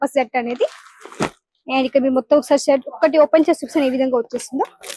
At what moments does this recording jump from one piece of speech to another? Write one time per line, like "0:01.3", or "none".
none